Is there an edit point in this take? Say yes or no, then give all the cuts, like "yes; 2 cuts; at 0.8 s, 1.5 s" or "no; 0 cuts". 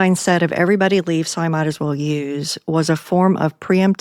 no; 0 cuts